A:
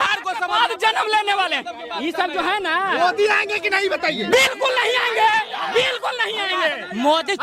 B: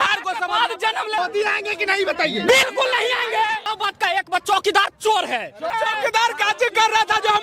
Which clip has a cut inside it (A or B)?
B